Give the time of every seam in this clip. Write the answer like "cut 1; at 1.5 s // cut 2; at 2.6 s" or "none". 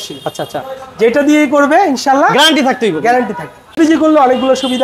cut 1; at 3.8 s